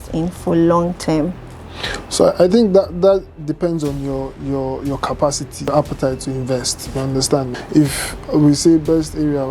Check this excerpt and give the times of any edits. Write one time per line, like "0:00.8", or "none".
0:05.7
0:07.6